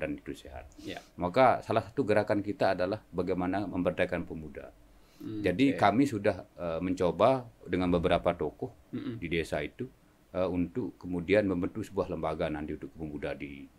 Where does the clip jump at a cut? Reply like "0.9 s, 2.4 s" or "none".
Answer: none